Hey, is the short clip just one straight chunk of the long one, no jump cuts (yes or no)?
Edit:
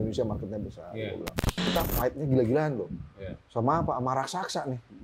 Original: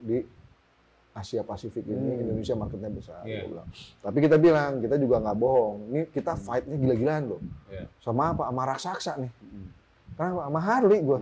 no